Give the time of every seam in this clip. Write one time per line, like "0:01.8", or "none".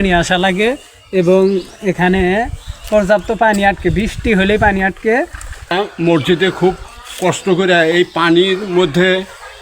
0:05.7

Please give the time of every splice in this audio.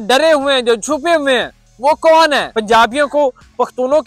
0:02.5

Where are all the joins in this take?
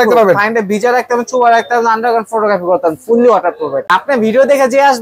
0:03.9

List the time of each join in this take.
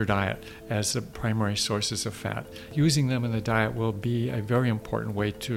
0:02.7

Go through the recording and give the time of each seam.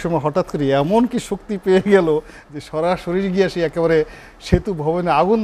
none

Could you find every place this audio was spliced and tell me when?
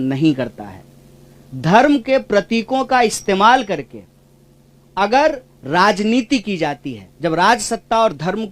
none

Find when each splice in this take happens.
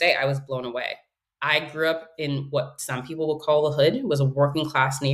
none

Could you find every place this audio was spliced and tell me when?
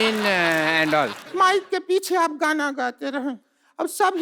0:01.2

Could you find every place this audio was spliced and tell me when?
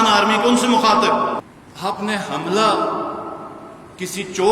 0:01.5

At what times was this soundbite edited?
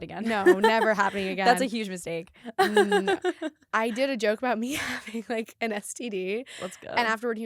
0:03.7

